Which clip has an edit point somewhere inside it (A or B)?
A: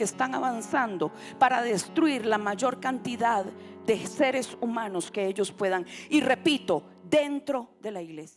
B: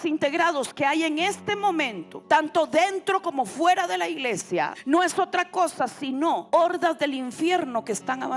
B